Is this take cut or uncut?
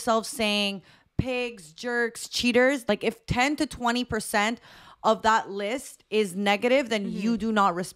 cut